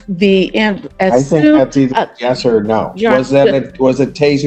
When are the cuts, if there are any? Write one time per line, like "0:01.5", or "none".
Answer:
none